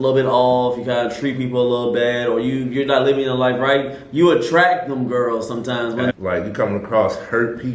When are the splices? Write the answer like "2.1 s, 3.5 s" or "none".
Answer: 6.1 s